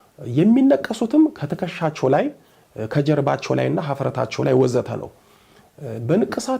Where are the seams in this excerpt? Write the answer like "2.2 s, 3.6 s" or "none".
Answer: none